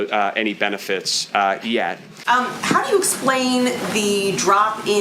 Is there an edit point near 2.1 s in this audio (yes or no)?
yes